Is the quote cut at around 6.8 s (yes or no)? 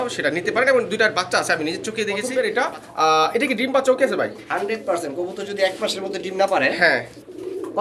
no